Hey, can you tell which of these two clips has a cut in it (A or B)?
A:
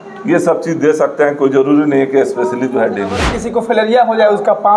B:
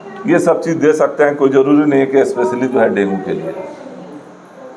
A